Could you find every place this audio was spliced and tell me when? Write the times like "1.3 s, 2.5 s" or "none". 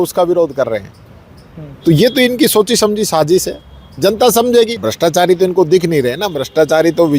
4.8 s